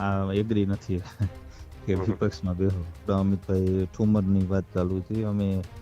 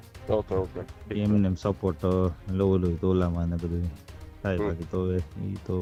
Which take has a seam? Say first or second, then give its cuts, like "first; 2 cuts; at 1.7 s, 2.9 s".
first; 1 cut; at 3.0 s